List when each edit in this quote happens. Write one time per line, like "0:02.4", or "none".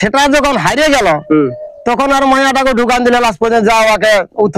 none